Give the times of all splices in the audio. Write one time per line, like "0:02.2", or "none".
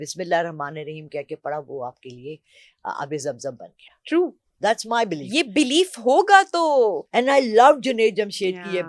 none